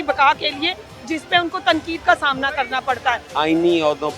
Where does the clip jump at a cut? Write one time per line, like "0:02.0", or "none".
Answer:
0:03.3